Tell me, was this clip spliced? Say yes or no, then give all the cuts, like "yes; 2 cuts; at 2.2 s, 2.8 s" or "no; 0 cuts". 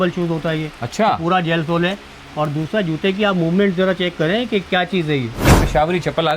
yes; 1 cut; at 5.4 s